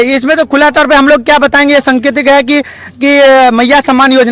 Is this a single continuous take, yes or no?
yes